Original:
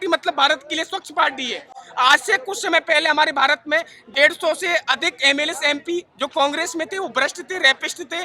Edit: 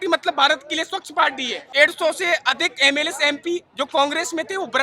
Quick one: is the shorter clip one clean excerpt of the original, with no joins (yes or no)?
no